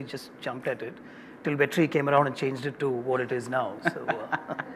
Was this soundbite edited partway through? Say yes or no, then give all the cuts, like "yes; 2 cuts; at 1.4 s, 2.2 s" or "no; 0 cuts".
no; 0 cuts